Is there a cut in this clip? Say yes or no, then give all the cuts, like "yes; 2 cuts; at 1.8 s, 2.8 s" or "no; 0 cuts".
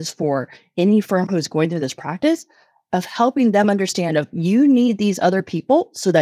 no; 0 cuts